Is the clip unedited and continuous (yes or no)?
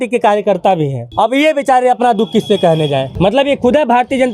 no